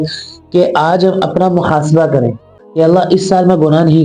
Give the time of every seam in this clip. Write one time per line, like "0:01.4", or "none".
0:02.6